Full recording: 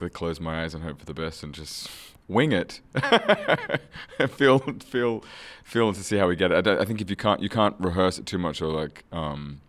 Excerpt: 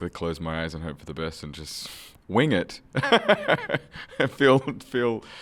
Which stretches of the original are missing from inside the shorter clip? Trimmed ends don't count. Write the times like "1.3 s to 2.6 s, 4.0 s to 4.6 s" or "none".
none

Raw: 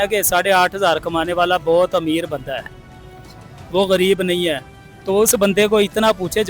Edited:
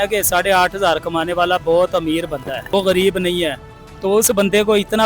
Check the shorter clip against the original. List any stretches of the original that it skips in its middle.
2.7 s to 3.7 s

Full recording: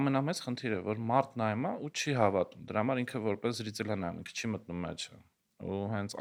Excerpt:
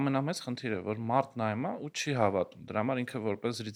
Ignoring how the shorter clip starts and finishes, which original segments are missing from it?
none

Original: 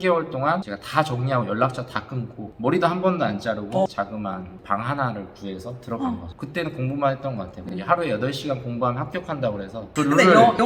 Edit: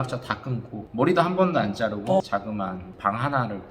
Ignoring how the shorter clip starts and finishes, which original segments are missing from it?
none

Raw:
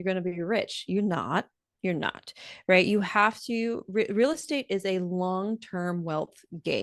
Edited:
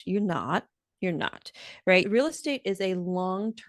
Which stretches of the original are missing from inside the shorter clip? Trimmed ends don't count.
2.9 s to 4.1 s

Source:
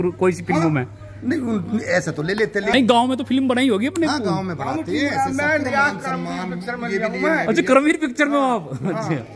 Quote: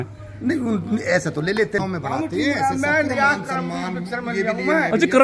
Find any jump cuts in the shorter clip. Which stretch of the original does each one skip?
2.6 s to 4.4 s

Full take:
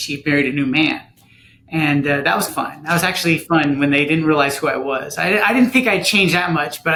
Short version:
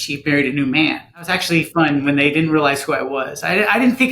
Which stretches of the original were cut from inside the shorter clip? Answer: 1.4 s to 3.1 s

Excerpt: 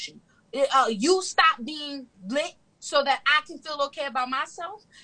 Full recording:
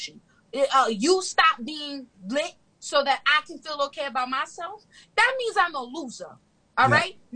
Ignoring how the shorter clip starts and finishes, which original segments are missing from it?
none

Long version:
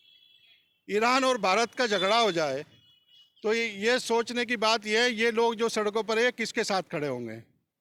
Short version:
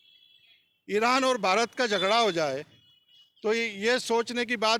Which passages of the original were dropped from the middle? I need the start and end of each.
none

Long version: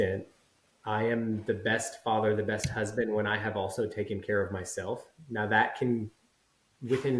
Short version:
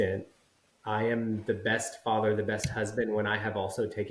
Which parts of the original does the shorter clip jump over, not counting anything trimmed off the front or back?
none

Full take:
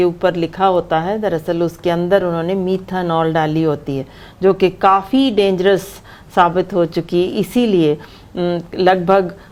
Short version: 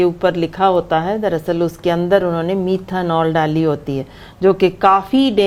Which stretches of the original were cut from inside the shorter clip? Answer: none

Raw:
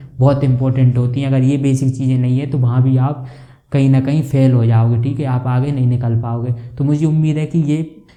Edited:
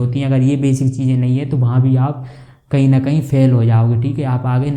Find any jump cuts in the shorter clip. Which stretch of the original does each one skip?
none

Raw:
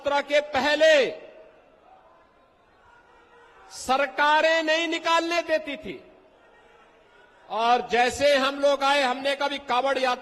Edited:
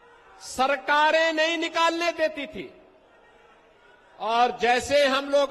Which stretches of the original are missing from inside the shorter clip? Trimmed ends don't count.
none

